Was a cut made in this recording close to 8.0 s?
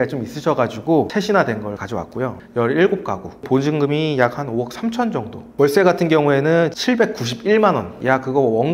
yes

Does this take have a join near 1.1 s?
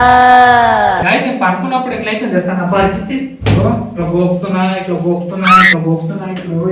yes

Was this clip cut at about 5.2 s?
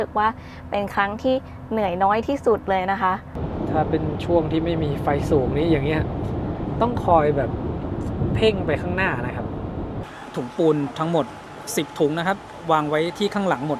no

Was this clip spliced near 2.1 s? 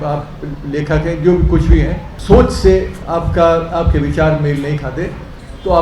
yes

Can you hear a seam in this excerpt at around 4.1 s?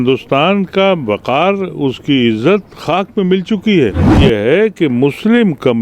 yes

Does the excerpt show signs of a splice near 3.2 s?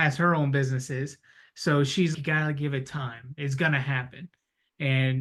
no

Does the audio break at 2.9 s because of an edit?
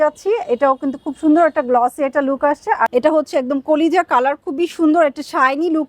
yes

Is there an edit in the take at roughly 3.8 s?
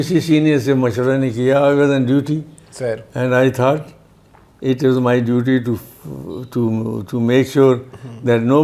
no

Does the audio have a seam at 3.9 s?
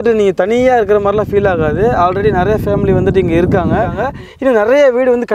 yes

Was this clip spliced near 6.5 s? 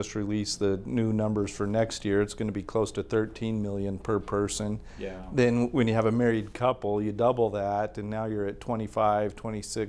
no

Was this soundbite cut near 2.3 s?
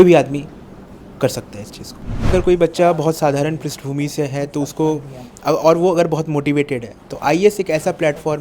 yes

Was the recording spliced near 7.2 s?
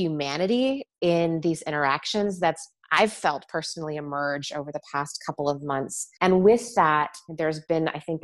yes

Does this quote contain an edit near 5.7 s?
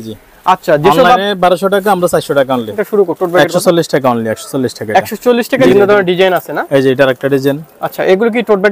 yes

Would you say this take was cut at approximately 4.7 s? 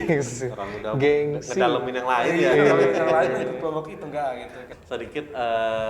yes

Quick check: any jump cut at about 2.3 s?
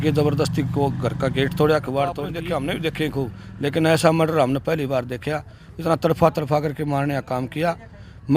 yes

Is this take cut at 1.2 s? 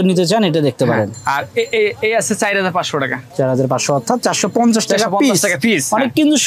yes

